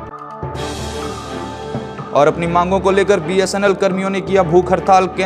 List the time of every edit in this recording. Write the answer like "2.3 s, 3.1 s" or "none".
1.6 s